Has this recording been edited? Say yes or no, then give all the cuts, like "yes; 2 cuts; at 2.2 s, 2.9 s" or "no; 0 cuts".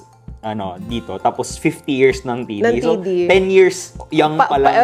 no; 0 cuts